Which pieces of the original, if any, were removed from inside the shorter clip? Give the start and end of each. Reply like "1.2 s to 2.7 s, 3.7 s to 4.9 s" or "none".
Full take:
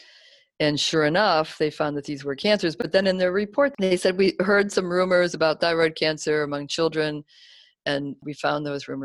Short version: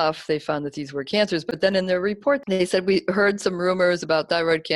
none